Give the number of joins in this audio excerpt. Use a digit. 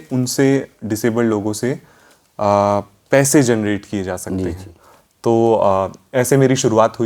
0